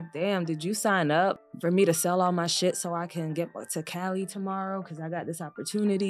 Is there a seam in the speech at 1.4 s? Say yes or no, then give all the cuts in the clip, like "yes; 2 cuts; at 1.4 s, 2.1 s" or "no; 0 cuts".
yes; 1 cut; at 1.4 s